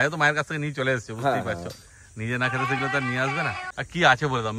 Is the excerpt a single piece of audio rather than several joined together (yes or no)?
yes